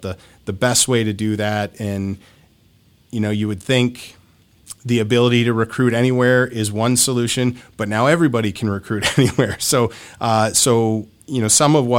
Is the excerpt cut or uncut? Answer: uncut